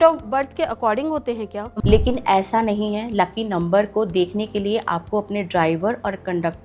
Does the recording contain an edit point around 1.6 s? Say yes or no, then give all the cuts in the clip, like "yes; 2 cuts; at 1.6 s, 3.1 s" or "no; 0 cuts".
yes; 1 cut; at 1.6 s